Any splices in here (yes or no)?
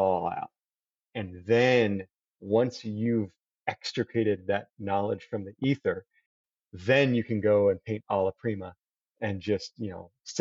no